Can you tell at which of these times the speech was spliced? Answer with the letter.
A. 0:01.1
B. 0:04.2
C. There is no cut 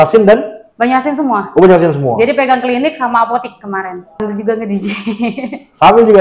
B